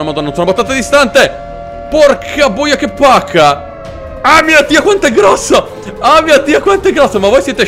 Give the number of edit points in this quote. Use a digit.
0